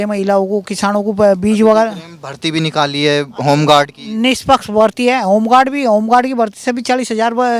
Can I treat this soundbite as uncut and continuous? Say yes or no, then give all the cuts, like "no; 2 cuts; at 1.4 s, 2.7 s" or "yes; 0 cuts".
yes; 0 cuts